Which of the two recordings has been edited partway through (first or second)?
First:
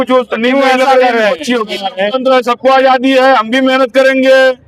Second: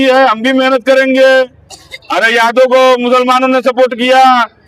first